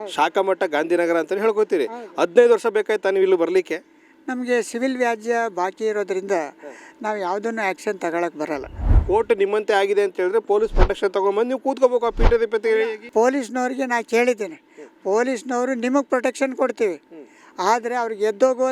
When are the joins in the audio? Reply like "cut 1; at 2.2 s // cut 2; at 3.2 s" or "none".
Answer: cut 1; at 9.0 s // cut 2; at 13.0 s